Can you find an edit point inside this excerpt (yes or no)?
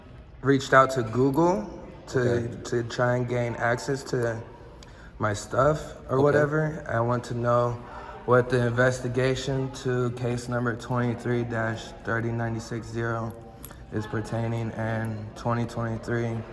no